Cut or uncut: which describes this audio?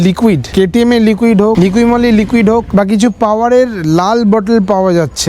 uncut